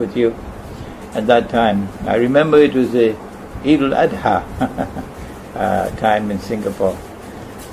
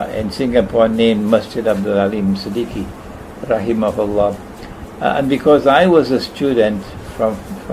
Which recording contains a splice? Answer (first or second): second